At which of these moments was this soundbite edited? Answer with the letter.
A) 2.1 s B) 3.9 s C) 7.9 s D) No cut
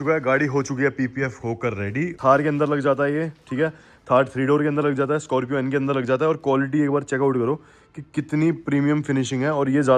A